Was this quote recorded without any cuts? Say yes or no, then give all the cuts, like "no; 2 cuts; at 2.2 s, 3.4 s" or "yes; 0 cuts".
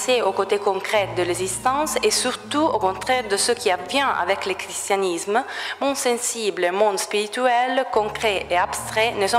yes; 0 cuts